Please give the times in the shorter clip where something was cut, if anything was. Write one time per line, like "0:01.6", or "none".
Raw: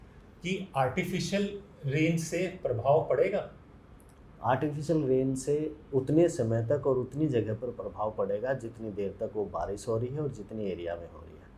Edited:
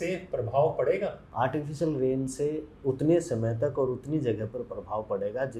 0:01.2